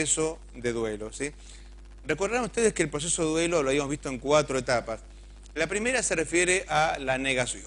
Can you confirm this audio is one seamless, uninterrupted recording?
no; 1 cut; at 1.4 s

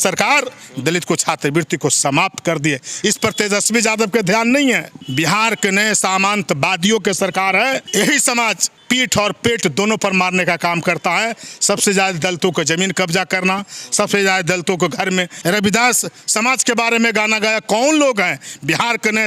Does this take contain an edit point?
yes; 4 cuts; at 4.9 s, 7.9 s, 8.7 s, 15.3 s

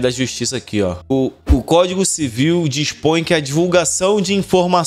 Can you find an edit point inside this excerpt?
yes; 1 cut; at 1.0 s

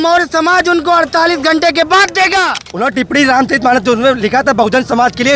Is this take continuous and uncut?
no; 1 cut; at 2.6 s

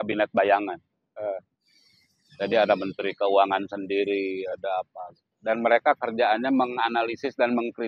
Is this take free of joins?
yes; 0 cuts

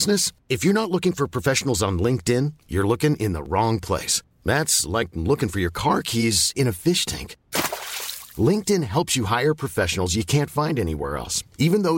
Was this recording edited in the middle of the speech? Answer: no; 0 cuts

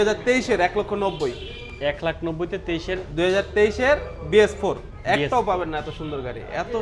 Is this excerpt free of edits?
yes; 0 cuts

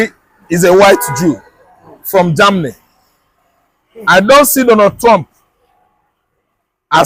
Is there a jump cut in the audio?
no; 0 cuts

